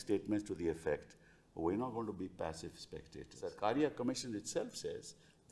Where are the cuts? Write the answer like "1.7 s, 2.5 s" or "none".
3.5 s